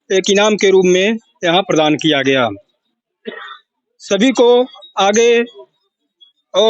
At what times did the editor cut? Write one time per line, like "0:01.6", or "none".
none